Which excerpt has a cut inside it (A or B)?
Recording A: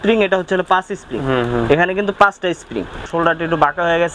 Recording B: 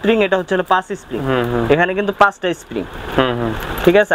A